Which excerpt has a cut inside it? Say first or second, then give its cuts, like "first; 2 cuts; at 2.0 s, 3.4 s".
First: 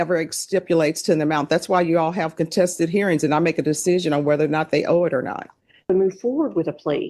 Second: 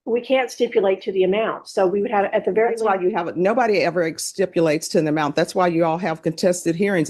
first; 1 cut; at 5.8 s